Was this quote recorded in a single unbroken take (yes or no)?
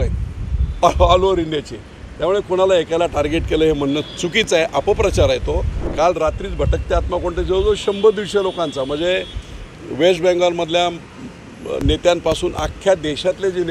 no